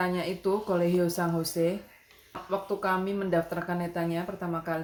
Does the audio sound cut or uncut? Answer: uncut